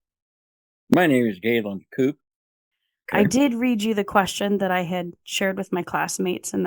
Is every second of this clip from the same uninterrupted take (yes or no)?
yes